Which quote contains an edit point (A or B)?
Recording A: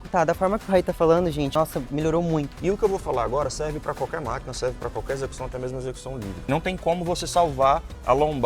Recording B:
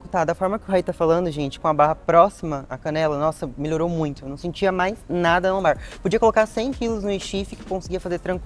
A